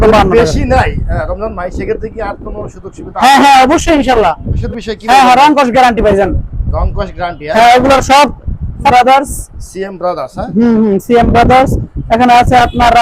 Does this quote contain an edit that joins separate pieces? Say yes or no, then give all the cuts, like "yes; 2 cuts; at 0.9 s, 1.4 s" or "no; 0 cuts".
yes; 2 cuts; at 4.5 s, 8.9 s